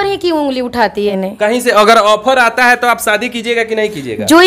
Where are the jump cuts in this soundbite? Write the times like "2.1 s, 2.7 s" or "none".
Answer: 1.1 s